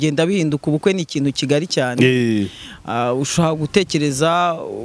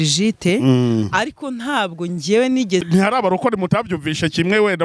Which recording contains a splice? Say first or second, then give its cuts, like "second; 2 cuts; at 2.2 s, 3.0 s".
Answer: second; 1 cut; at 2.8 s